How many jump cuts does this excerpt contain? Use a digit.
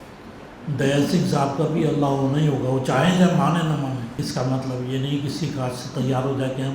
1